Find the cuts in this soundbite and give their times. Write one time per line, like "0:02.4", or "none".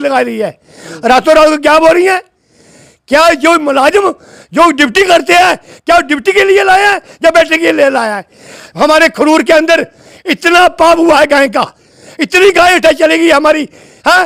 none